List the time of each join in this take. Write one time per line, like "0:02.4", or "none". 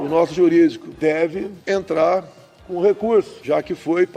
0:01.2
0:03.4